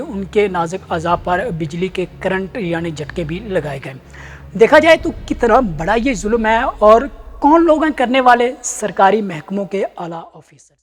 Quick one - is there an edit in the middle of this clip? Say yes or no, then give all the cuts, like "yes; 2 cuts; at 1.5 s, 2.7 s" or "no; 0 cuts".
no; 0 cuts